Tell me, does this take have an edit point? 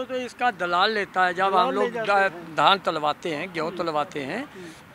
no; 0 cuts

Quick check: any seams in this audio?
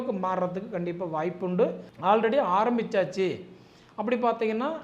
yes; 1 cut; at 1.9 s

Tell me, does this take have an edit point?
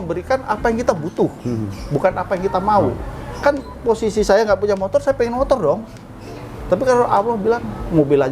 no; 0 cuts

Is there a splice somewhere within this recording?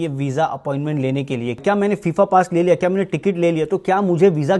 yes; 1 cut; at 1.6 s

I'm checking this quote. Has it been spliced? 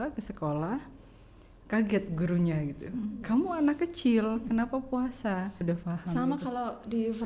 yes; 1 cut; at 5.6 s

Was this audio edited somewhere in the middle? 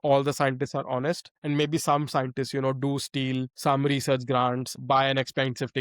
yes; 3 cuts; at 1.3 s, 3.5 s, 4.7 s

